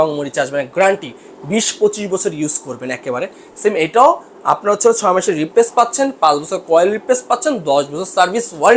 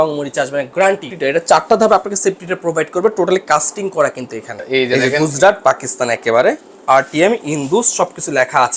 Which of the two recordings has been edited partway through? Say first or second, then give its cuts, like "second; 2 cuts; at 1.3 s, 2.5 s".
second; 2 cuts; at 1.1 s, 4.6 s